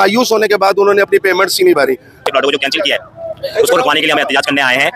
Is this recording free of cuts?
no; 1 cut; at 2.2 s

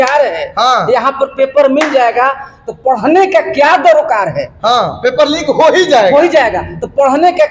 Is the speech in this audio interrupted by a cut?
no; 0 cuts

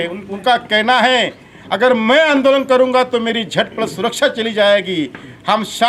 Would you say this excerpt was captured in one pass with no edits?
yes; 0 cuts

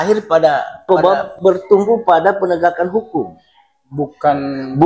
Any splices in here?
yes; 1 cut; at 1.3 s

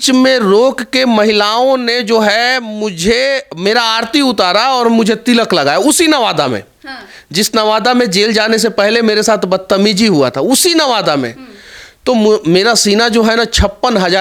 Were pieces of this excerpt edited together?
no; 0 cuts

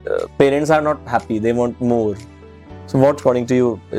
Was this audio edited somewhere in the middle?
no; 0 cuts

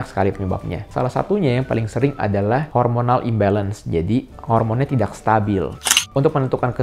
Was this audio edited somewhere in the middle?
yes; 1 cut; at 5.8 s

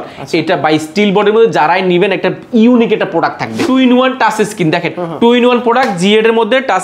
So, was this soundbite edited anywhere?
yes; 1 cut; at 3.5 s

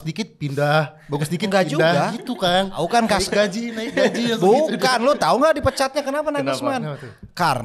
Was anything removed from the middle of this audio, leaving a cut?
yes; 1 cut; at 2.8 s

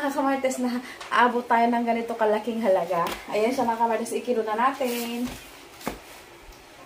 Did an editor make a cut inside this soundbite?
no; 0 cuts

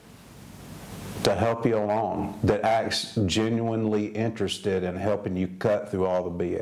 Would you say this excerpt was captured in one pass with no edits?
yes; 0 cuts

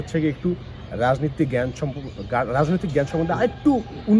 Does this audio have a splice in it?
no; 0 cuts

